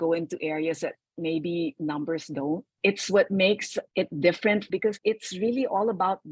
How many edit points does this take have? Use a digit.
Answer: 2